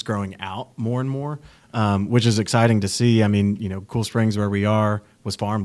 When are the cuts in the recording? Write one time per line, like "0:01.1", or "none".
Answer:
none